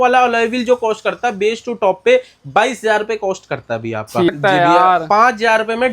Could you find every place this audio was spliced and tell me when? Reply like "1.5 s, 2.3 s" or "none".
4.3 s